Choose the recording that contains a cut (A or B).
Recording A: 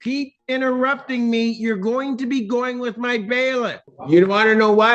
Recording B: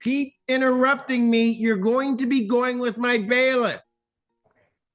A